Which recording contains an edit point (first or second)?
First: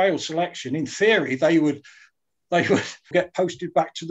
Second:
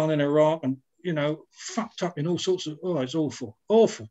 first